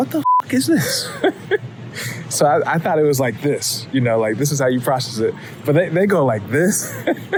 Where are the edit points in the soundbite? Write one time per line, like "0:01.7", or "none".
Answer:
none